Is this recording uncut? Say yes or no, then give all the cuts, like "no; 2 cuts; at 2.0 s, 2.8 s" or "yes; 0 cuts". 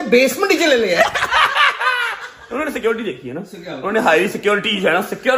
yes; 0 cuts